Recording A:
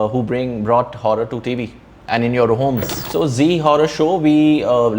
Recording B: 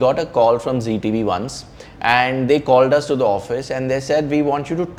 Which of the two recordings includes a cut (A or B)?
A